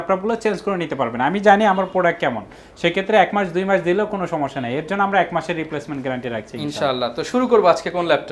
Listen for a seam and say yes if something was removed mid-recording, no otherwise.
no